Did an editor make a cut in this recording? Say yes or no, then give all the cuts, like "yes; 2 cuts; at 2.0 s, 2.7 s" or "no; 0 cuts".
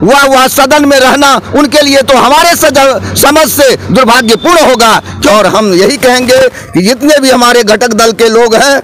yes; 1 cut; at 5.3 s